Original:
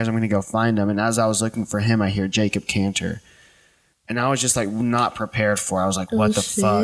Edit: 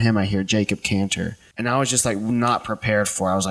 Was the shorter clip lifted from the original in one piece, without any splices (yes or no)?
no